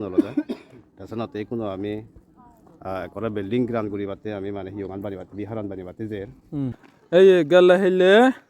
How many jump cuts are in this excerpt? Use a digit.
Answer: 1